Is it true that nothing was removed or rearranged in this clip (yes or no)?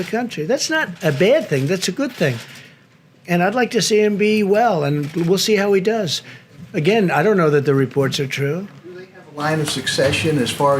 yes